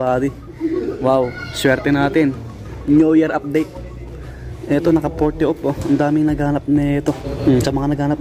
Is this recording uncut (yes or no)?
no